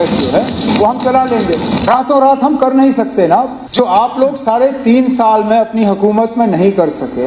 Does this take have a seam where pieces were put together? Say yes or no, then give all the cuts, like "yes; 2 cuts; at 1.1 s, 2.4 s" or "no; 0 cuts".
yes; 2 cuts; at 1.8 s, 3.6 s